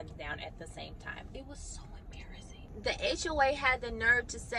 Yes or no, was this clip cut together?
yes